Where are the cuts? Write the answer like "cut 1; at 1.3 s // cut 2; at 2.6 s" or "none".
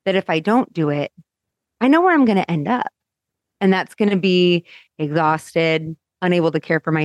cut 1; at 6.0 s